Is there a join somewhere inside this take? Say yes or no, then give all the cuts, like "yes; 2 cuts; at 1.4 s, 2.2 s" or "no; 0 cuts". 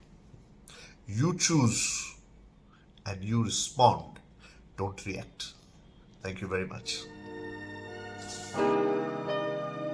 yes; 1 cut; at 7.5 s